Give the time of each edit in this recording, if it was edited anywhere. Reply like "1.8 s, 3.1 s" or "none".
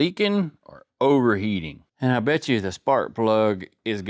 1.8 s